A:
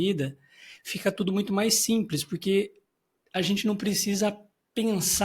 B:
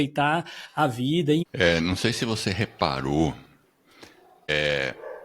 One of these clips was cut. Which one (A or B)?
B